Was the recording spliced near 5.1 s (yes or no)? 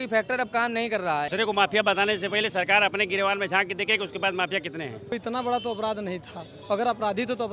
yes